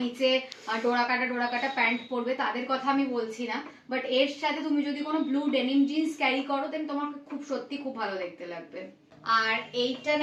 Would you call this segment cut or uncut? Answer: uncut